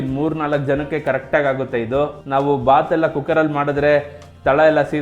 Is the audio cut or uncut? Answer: cut